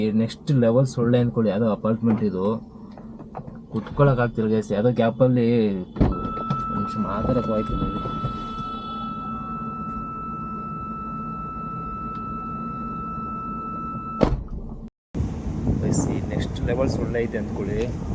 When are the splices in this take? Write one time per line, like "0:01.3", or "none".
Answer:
none